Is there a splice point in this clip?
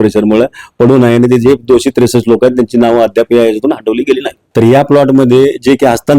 yes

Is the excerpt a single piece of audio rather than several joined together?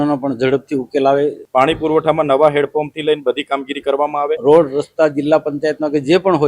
no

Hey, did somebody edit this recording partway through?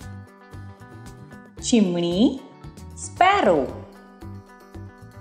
yes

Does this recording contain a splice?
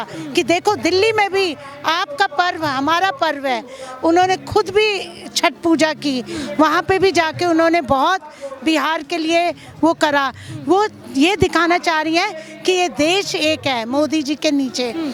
no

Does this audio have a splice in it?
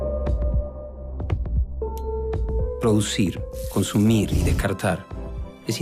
yes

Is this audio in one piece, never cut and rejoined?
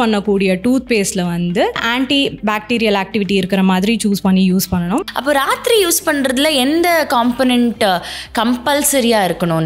no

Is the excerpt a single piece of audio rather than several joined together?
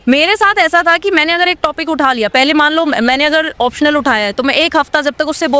yes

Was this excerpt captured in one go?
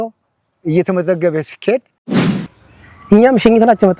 no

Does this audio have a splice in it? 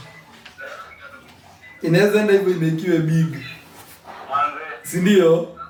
no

